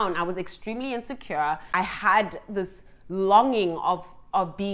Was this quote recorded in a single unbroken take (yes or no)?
yes